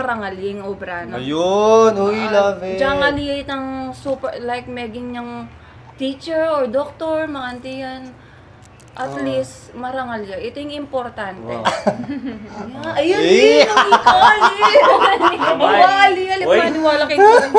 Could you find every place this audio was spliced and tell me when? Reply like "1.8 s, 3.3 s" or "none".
none

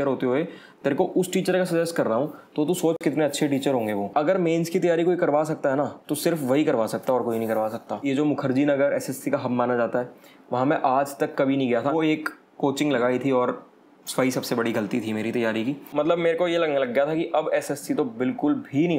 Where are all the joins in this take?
4.1 s, 8.0 s, 11.9 s, 15.9 s

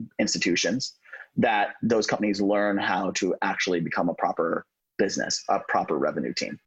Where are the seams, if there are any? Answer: none

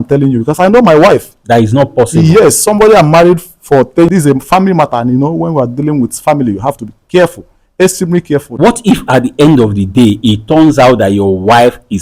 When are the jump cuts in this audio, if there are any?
4.1 s, 8.5 s

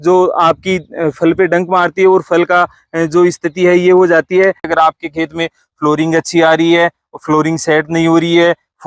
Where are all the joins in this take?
4.6 s

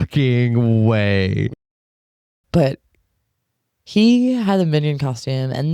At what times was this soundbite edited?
1.8 s

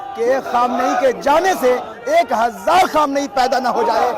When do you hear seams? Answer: none

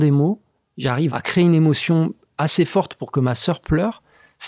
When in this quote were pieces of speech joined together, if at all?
1.1 s

